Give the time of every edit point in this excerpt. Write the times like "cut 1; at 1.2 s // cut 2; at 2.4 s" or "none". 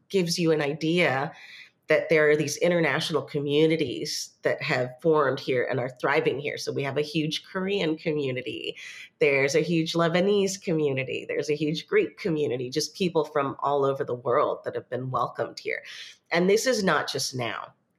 none